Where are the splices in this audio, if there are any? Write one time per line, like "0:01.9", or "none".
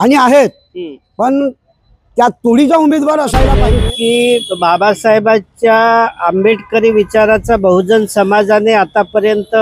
0:03.6